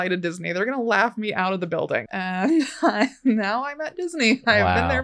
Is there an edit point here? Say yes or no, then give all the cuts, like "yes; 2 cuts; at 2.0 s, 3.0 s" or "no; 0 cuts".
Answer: yes; 1 cut; at 2.1 s